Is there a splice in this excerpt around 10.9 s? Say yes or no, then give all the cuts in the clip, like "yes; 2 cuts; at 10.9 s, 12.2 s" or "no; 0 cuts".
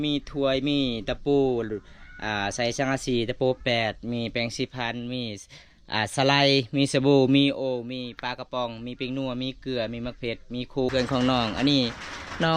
yes; 1 cut; at 10.9 s